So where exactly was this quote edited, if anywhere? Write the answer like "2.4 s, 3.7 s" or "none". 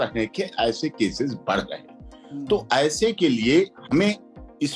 none